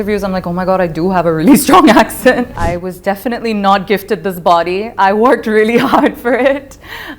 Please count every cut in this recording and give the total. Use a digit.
1